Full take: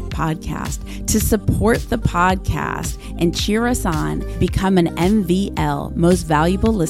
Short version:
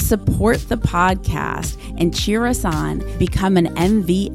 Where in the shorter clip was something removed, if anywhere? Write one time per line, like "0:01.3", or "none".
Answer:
none